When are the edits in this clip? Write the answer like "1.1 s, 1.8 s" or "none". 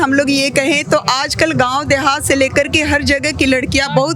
none